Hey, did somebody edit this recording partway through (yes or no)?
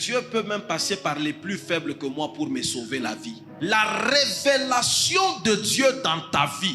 yes